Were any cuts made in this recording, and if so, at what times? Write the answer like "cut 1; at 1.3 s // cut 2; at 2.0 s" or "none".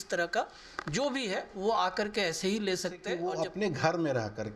cut 1; at 3.1 s

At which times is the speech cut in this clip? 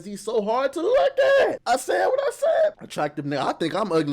cut 1; at 1.6 s // cut 2; at 2.8 s

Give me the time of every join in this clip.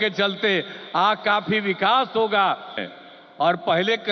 cut 1; at 2.9 s

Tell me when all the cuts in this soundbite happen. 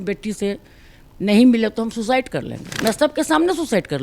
cut 1; at 2.6 s

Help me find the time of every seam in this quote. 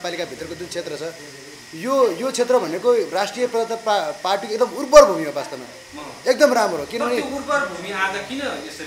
none

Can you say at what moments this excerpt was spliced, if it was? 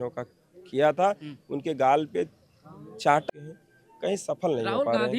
cut 1; at 3.2 s

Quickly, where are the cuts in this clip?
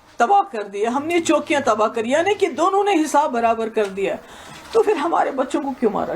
none

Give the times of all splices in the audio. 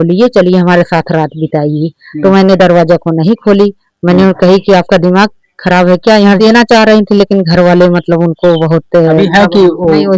cut 1; at 6.4 s

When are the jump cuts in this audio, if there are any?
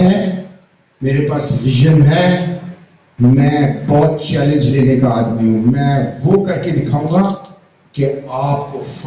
none

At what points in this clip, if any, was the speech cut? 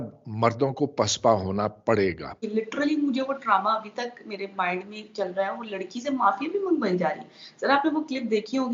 cut 1; at 2.3 s

